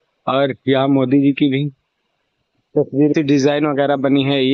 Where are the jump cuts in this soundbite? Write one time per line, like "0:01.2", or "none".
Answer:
0:03.1